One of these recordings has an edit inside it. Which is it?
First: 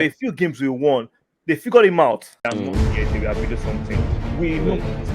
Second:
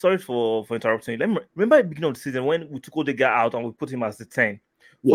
first; 1 cut; at 2.3 s

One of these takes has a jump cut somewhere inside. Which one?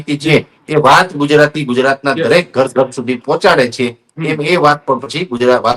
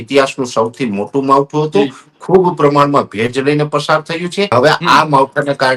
second; 1 cut; at 4.5 s

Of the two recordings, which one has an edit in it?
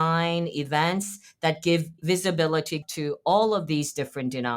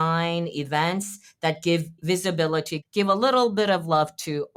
first; 1 cut; at 2.9 s

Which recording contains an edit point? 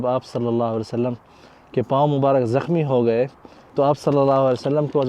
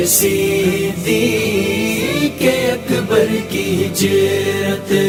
first; 1 cut; at 3.7 s

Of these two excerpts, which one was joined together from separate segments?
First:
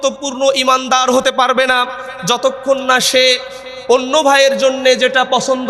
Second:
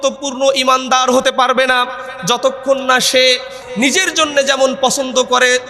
second; 1 cut; at 3.6 s

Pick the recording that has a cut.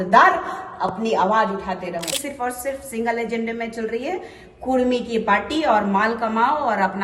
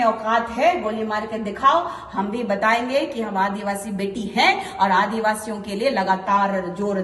first; 1 cut; at 2.2 s

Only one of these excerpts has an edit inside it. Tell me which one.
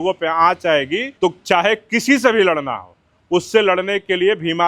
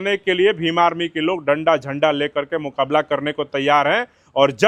first; 1 cut; at 1.1 s

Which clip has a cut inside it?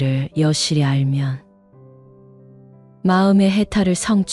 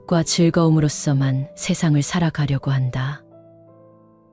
first; 2 cuts; at 1.4 s, 3.0 s

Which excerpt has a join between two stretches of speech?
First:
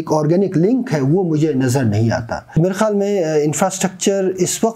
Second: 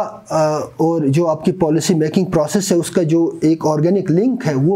first; 1 cut; at 2.4 s

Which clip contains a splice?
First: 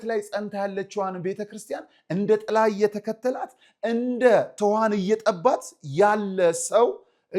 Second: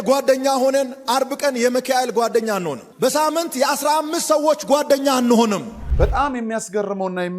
second; 1 cut; at 5.8 s

